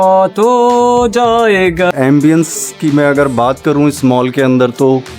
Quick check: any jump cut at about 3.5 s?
no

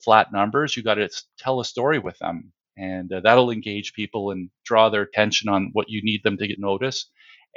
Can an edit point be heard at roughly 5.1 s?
yes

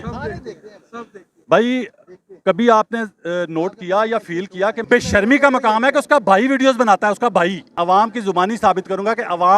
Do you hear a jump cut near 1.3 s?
no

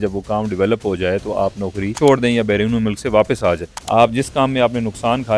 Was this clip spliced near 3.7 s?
yes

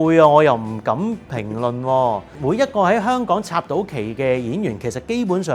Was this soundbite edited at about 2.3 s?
yes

